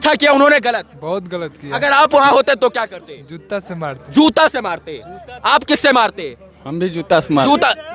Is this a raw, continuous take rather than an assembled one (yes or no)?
yes